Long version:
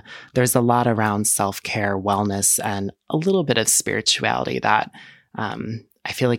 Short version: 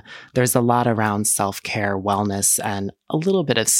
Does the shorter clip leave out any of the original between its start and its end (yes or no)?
no